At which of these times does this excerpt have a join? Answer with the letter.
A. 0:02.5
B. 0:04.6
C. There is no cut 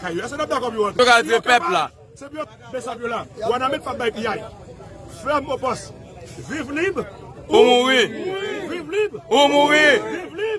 A